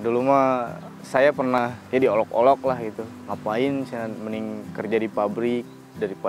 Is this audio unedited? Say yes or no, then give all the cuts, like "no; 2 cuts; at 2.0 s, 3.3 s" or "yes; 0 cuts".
no; 1 cut; at 1.6 s